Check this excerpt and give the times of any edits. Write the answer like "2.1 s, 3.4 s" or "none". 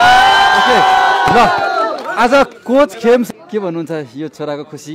3.3 s